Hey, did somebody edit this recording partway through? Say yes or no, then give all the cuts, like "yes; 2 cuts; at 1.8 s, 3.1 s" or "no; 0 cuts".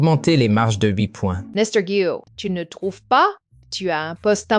yes; 2 cuts; at 1.4 s, 2.3 s